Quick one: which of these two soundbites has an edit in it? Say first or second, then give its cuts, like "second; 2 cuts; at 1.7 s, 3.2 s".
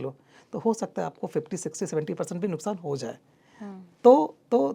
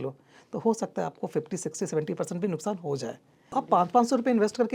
second; 1 cut; at 3.4 s